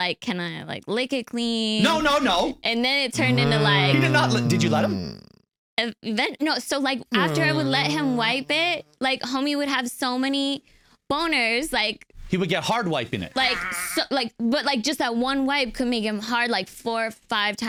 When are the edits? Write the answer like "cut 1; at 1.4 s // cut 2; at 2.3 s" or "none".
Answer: none